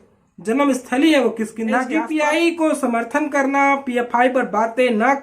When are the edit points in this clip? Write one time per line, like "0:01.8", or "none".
0:01.9